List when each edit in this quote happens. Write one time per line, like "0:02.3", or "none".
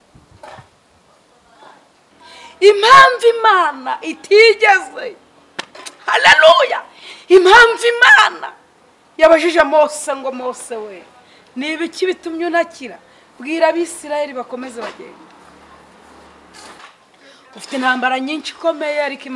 0:02.1
0:16.8